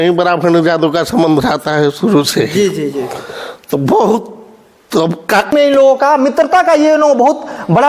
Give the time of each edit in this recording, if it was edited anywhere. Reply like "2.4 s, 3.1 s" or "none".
5.5 s